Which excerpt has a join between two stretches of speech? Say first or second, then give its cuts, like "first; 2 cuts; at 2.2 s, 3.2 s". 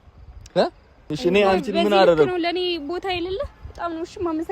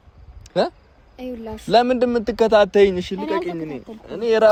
first; 1 cut; at 1.0 s